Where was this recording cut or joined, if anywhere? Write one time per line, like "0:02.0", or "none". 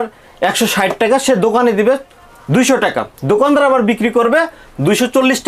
none